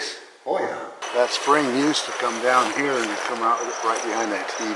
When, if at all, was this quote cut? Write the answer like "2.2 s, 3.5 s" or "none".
0.9 s